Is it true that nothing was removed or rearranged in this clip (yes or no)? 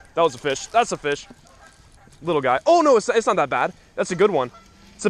yes